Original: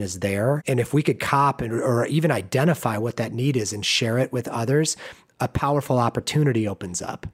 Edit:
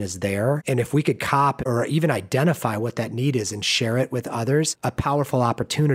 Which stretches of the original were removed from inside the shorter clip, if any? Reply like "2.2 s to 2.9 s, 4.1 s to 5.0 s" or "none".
1.6 s to 1.8 s, 5.0 s to 5.3 s